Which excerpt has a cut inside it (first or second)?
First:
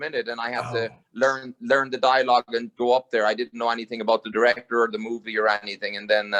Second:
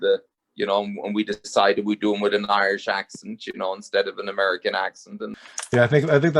second